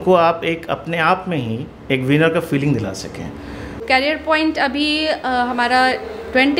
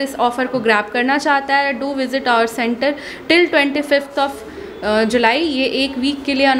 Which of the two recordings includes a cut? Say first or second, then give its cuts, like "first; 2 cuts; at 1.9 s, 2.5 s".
first; 1 cut; at 3.8 s